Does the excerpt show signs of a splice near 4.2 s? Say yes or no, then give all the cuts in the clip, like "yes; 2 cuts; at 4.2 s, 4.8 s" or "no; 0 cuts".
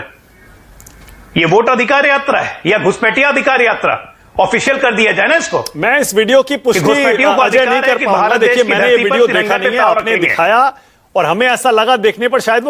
no; 0 cuts